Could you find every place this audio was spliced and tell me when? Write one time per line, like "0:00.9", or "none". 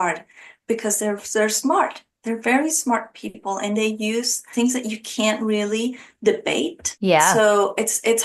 none